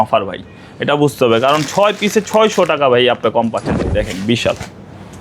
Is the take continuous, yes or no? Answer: no